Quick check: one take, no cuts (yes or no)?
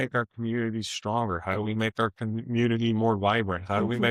yes